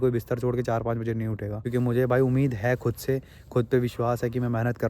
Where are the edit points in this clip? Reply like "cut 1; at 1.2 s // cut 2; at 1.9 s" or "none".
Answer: cut 1; at 1.5 s